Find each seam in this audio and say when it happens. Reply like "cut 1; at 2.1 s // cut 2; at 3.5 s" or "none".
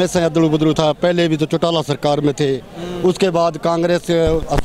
none